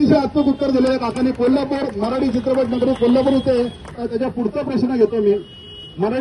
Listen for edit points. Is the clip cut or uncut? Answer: cut